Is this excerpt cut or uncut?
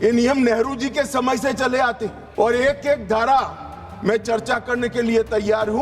cut